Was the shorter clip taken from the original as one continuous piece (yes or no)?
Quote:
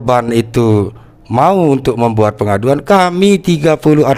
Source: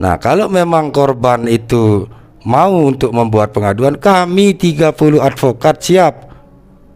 yes